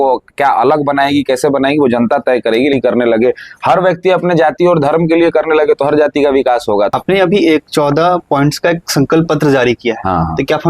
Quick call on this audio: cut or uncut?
cut